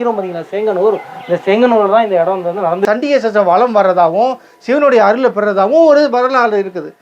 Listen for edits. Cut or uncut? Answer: cut